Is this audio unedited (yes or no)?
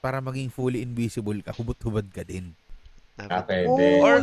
no